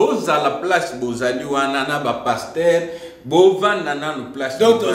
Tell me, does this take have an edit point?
no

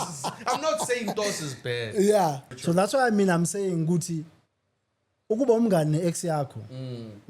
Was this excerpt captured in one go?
no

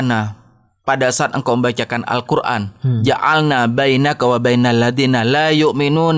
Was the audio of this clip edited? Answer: no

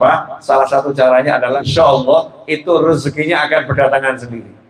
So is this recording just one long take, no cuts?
no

